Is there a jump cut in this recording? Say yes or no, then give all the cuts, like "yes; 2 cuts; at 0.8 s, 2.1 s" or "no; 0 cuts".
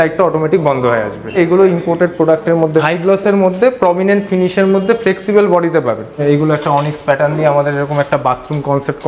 yes; 3 cuts; at 1.3 s, 2.8 s, 6.2 s